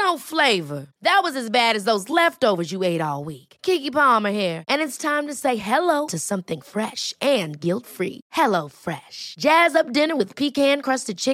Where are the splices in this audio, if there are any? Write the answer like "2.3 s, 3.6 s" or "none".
none